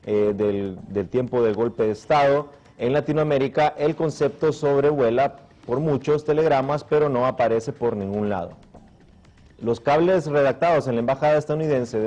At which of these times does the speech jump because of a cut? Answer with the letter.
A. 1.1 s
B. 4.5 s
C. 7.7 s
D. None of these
A